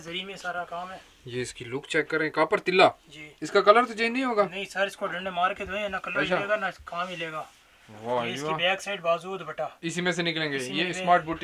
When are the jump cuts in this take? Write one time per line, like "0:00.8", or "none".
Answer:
none